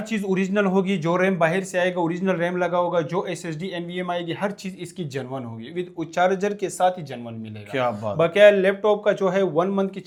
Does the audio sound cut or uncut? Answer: uncut